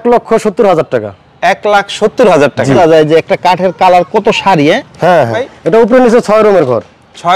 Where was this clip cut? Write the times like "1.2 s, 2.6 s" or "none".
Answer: 2.8 s, 5.4 s